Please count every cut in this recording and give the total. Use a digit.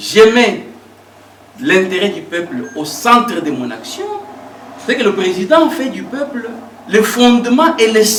0